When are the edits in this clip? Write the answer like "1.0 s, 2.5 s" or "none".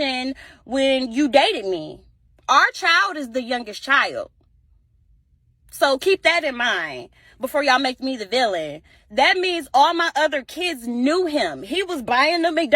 5.8 s